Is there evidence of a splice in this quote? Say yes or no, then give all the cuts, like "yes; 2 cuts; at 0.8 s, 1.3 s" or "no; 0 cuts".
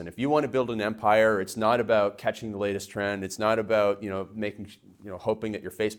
no; 0 cuts